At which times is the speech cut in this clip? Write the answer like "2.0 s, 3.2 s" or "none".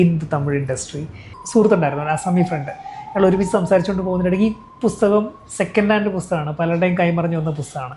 1.3 s